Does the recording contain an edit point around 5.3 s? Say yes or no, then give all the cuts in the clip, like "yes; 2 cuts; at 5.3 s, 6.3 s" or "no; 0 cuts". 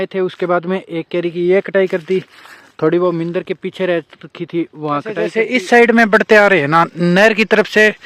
yes; 1 cut; at 5.3 s